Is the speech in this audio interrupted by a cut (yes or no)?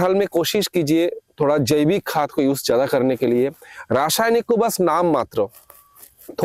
no